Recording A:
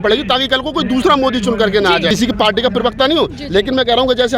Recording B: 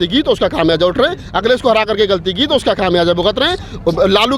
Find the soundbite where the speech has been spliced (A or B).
A